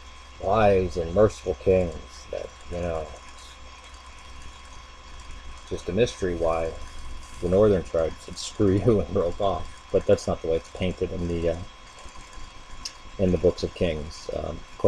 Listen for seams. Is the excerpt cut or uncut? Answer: cut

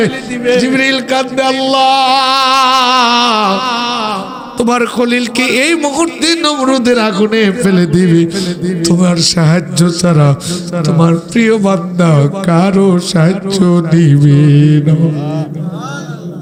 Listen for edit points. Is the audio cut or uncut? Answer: uncut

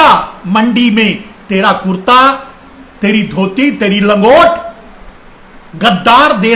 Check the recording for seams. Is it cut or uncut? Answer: uncut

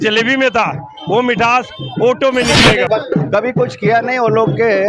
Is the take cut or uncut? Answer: cut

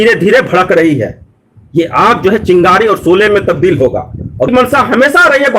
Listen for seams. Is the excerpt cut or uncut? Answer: cut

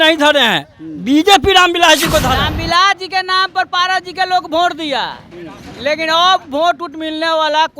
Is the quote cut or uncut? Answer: cut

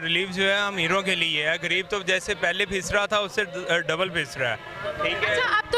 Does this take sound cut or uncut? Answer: uncut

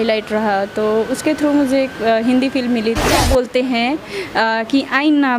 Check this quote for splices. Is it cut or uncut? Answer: cut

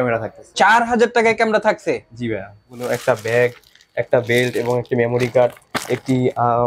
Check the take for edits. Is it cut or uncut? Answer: cut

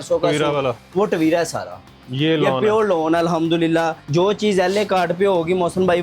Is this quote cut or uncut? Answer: cut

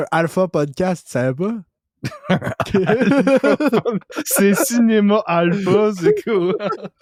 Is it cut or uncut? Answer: uncut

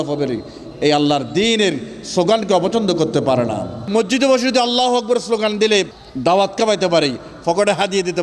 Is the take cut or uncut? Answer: cut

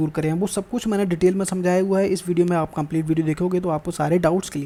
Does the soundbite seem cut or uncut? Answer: uncut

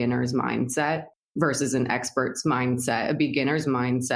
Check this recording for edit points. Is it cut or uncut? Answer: cut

